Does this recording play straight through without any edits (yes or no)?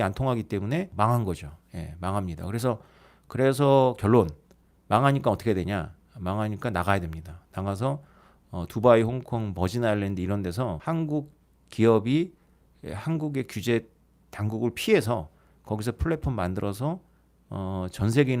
no